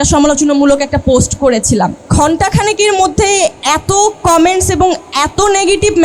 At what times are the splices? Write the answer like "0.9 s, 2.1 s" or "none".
2.1 s, 3.6 s